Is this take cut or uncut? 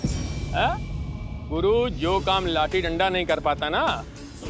uncut